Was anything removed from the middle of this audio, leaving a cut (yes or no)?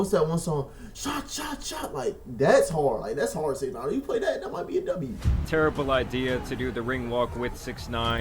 yes